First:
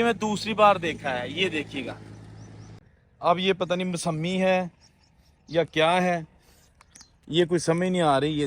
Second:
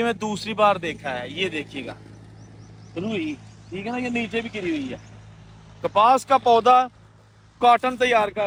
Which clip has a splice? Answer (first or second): first